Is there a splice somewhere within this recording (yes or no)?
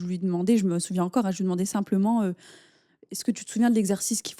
no